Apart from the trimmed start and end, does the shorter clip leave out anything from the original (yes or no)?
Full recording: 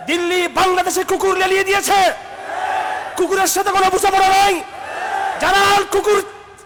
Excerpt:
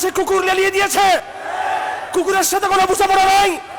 yes